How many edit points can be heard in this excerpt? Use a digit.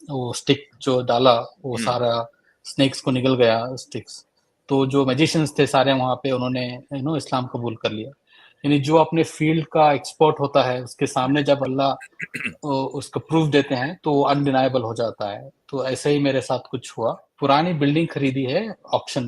1